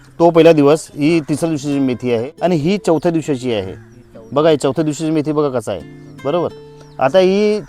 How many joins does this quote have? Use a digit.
1